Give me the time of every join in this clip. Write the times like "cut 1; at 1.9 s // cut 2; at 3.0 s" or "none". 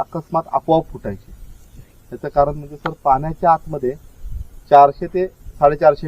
none